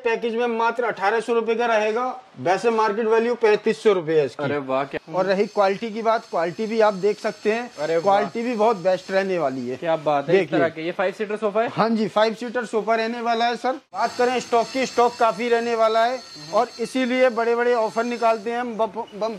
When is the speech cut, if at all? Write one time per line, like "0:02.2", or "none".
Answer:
0:04.9
0:14.0